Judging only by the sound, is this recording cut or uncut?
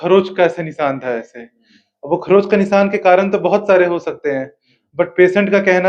uncut